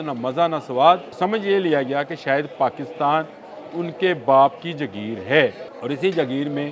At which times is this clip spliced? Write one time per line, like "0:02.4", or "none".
0:01.1
0:05.7